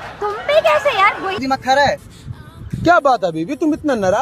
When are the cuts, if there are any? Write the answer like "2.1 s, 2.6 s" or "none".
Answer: 1.3 s

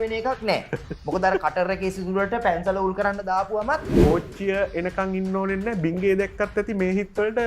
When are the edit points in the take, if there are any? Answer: 3.9 s

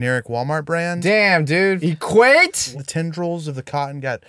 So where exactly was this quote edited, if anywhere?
1.8 s, 2.8 s

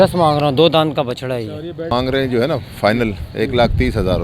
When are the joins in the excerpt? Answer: 1.9 s

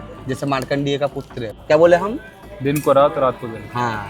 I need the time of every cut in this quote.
1.5 s

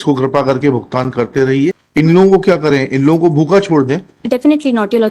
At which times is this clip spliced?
1.8 s

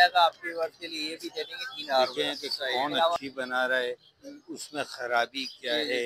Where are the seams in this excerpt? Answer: 3.2 s

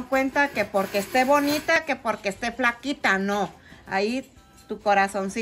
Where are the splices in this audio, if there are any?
1.8 s

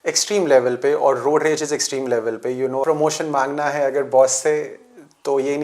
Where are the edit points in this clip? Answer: 2.8 s

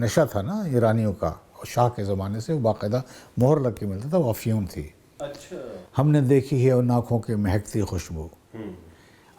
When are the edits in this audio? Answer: 5.8 s

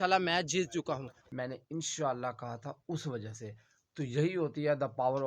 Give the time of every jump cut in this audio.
1.2 s

